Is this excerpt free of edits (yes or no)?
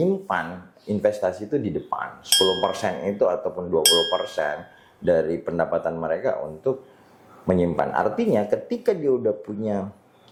yes